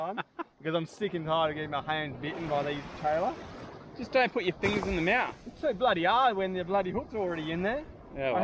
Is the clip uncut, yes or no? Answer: yes